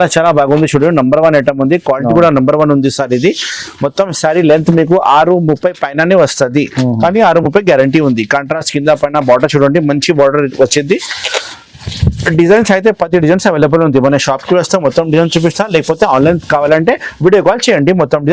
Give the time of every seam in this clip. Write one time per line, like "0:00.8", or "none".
none